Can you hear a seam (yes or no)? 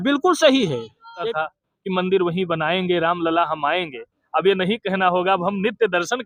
yes